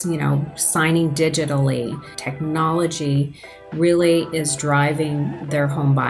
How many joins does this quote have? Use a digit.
1